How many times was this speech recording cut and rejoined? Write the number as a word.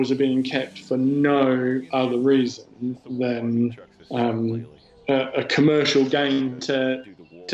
zero